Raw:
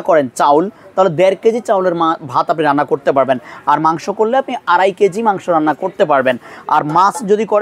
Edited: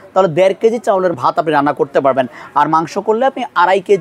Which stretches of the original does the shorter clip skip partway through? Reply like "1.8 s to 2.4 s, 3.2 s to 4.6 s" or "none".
2.0 s to 2.3 s